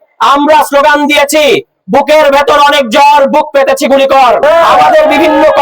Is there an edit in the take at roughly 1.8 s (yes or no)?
no